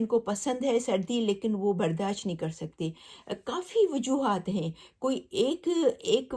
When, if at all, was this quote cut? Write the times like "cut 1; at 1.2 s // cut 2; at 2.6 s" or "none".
cut 1; at 3.1 s